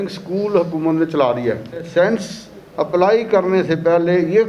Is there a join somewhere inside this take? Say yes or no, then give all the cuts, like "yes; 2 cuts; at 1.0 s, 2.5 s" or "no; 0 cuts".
yes; 1 cut; at 1.9 s